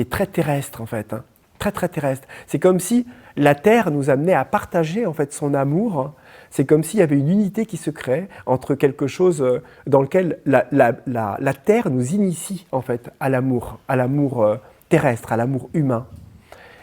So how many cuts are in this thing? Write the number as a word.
zero